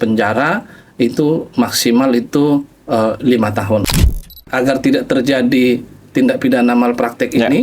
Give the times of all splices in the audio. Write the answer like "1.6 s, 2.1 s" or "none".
3.8 s